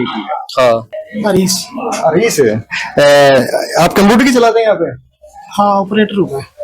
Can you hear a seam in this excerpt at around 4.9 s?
no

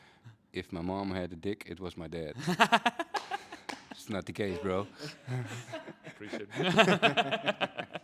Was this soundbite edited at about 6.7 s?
no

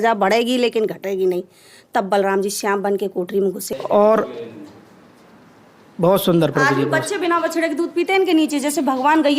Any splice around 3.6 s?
yes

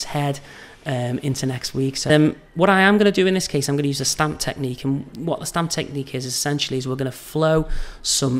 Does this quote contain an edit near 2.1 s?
yes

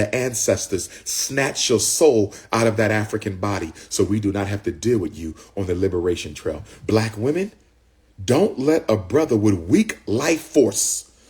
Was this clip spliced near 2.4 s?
no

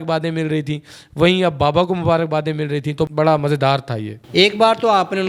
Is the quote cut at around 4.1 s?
yes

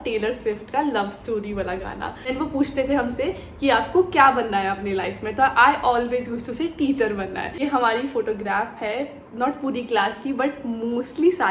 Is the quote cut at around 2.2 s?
yes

